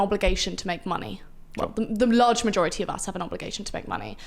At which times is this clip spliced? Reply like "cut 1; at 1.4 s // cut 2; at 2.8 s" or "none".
none